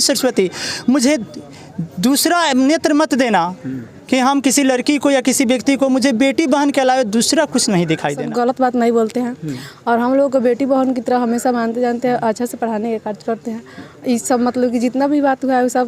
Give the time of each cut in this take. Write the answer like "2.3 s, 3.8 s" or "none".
8.2 s